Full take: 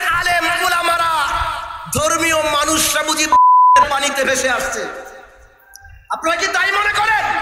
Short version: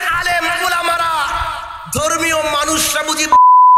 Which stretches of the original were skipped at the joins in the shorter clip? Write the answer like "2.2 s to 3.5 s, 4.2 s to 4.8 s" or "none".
none